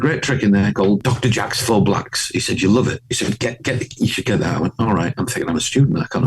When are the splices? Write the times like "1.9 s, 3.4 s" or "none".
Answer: 1.0 s